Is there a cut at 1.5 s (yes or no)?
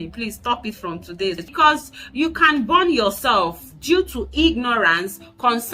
yes